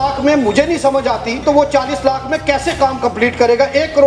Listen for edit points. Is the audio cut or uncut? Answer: cut